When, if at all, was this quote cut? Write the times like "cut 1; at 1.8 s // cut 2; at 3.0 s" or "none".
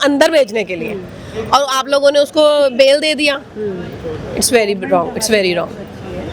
none